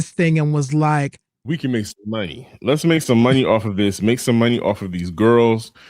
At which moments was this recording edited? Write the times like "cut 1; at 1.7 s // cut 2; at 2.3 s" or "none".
cut 1; at 1.3 s